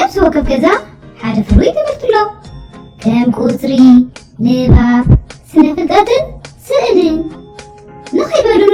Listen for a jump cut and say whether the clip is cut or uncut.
uncut